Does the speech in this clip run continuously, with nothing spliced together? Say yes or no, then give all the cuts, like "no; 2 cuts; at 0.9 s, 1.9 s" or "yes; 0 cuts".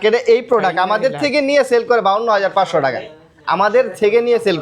yes; 0 cuts